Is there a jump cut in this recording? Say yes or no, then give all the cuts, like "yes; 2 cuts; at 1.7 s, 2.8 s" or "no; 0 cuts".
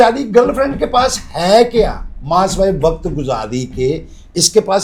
no; 0 cuts